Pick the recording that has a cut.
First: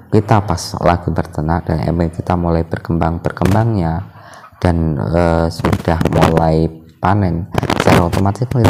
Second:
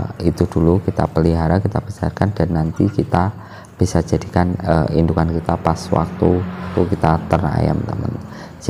second; 1 cut; at 6.7 s

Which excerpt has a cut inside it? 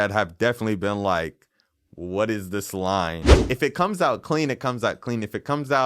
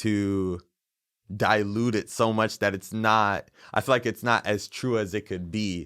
first; 1 cut; at 3.3 s

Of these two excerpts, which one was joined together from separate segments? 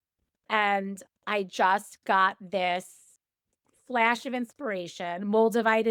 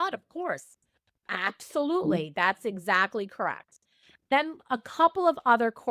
second; 1 cut; at 4.3 s

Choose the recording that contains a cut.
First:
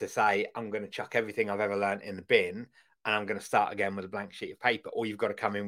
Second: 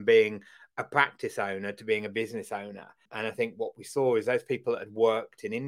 second; 1 cut; at 3.1 s

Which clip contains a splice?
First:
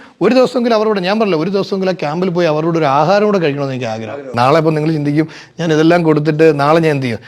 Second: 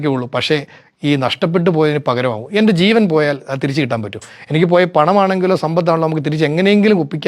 first; 1 cut; at 4.3 s

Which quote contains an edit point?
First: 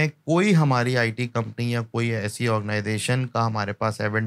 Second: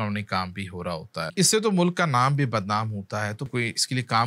second; 2 cuts; at 1.3 s, 3.5 s

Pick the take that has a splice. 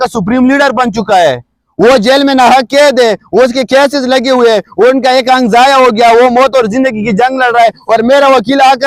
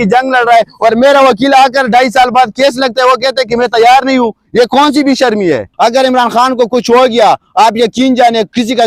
second; 1 cut; at 5.7 s

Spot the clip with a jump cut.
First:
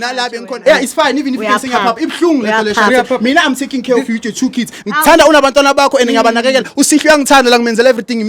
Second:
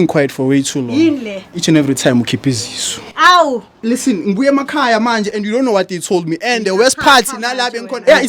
second; 2 cuts; at 1.5 s, 3.8 s

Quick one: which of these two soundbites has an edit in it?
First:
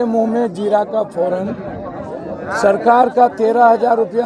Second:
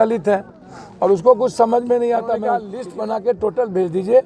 second; 1 cut; at 2.8 s

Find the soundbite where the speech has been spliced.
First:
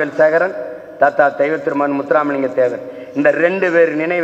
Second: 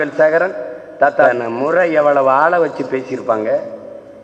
second; 1 cut; at 1.2 s

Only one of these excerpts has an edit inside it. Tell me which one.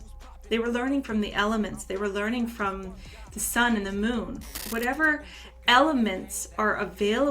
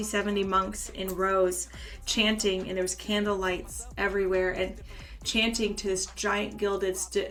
first; 1 cut; at 4.6 s

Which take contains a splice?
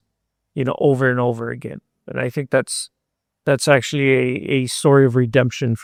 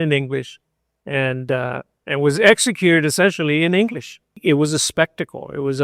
second; 1 cut; at 4.4 s

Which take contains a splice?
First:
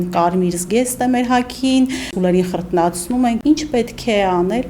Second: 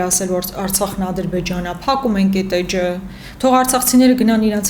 first; 2 cuts; at 2.1 s, 3.4 s

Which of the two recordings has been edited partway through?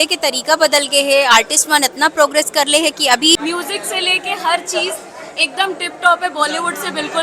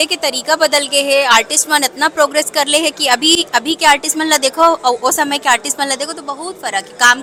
first; 1 cut; at 3.4 s

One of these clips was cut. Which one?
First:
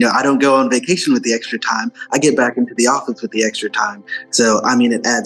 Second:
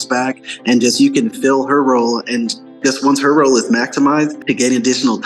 second; 1 cut; at 4.4 s

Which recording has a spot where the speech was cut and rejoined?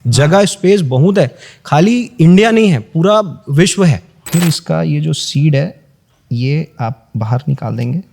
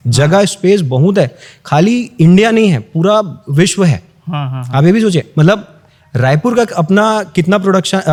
first; 1 cut; at 4.1 s

